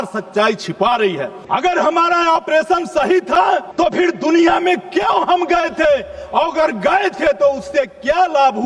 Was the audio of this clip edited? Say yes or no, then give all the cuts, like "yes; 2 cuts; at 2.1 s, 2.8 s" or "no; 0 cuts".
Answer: yes; 2 cuts; at 1.4 s, 3.7 s